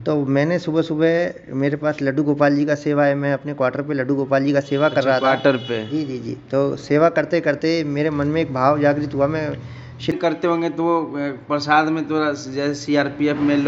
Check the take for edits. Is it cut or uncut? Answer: cut